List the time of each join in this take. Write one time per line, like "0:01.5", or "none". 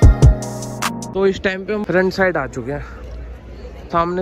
0:01.0